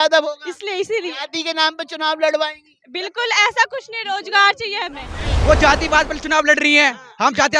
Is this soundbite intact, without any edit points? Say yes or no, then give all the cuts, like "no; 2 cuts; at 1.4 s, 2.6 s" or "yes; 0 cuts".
no; 1 cut; at 5.2 s